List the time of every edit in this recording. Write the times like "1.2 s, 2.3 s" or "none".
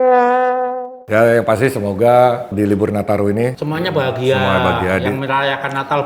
0.9 s, 2.5 s, 3.6 s